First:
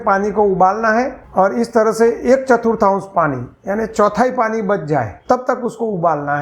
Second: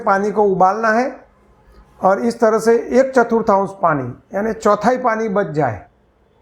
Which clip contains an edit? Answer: first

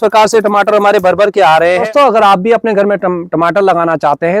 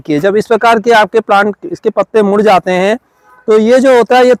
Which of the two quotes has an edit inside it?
first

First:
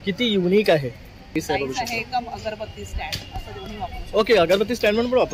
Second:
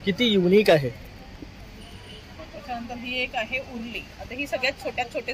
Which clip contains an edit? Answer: first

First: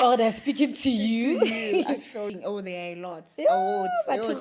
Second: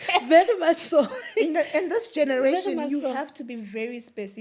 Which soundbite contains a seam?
first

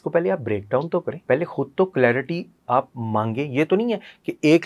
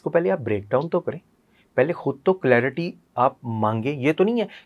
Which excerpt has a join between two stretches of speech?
first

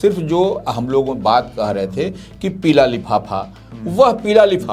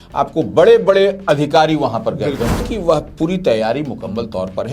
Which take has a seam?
second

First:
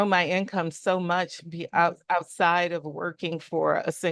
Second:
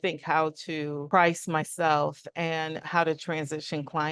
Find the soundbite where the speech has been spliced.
second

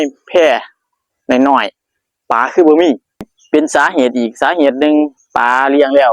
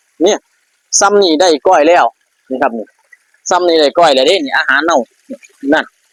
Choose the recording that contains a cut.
first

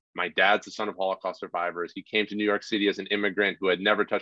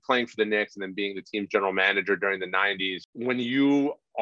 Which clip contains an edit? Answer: second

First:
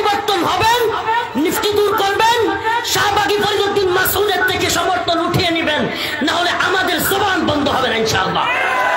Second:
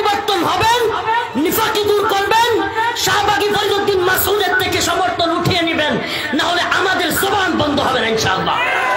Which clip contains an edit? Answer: first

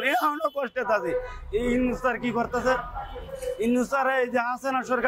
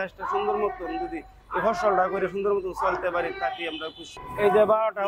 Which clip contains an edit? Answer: second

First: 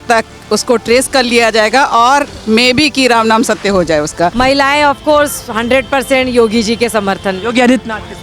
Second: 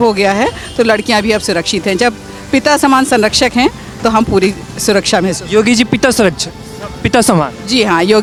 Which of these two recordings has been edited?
first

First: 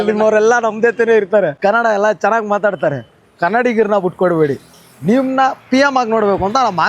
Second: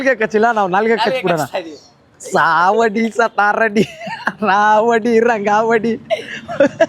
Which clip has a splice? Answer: first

